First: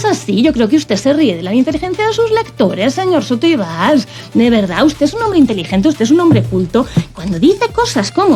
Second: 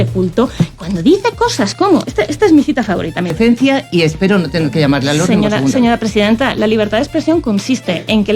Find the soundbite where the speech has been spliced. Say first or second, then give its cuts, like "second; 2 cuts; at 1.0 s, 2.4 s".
second; 1 cut; at 3.3 s